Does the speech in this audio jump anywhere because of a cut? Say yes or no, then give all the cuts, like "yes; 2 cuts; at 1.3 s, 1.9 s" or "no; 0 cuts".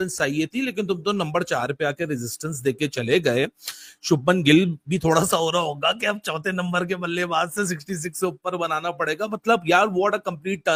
no; 0 cuts